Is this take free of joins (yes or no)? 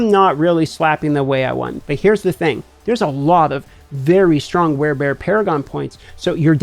no